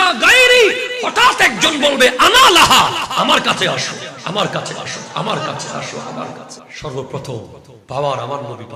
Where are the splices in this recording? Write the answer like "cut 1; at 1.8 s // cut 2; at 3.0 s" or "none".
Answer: cut 1; at 6.6 s

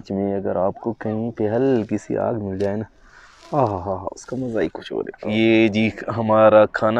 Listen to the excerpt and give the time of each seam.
cut 1; at 5.2 s

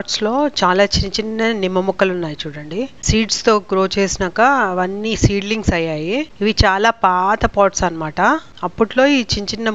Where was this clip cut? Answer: none

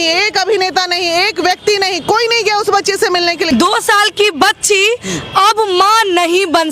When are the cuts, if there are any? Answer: cut 1; at 3.4 s

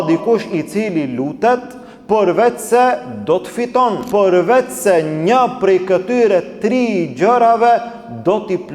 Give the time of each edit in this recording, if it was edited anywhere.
cut 1; at 4.0 s

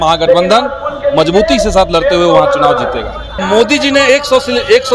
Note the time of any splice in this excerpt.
cut 1; at 3.4 s

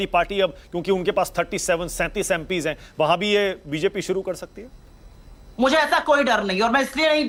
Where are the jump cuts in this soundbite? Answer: none

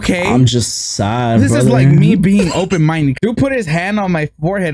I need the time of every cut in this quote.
cut 1; at 3.2 s

